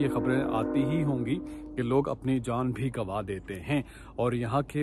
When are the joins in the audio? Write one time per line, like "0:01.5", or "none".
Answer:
none

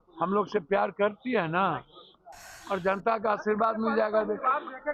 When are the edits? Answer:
none

